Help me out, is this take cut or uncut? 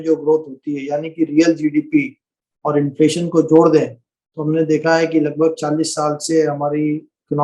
uncut